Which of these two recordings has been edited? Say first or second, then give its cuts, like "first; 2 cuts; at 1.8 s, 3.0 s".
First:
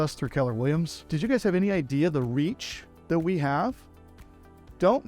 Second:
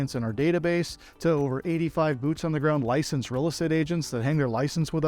first; 1 cut; at 1.0 s